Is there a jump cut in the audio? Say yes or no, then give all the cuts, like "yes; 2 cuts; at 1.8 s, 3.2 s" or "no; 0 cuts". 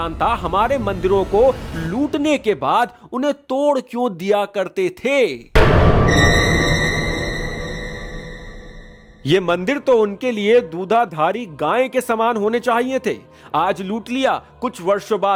no; 0 cuts